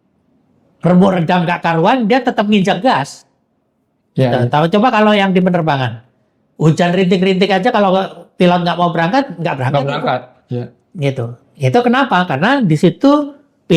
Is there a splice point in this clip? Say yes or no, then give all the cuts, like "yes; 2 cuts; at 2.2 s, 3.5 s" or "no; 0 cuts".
no; 0 cuts